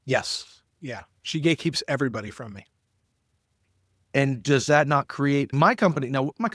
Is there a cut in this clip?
yes; 1 cut; at 5.5 s

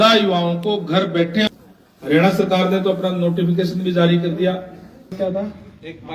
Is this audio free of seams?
no; 2 cuts; at 1.5 s, 5.1 s

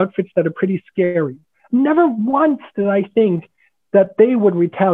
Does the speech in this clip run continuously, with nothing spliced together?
no; 1 cut; at 1.3 s

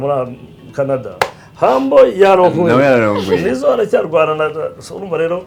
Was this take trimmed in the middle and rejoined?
no; 0 cuts

